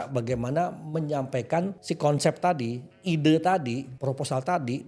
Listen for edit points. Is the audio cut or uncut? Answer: cut